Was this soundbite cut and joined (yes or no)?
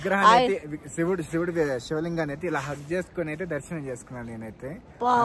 no